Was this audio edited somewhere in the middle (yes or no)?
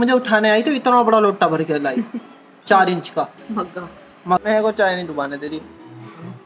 yes